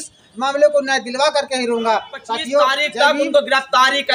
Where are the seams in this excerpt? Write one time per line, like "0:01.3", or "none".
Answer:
0:02.8